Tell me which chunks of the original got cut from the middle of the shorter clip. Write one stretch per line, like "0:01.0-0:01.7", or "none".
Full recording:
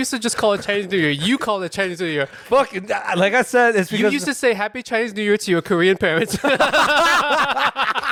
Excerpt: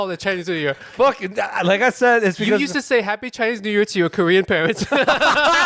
none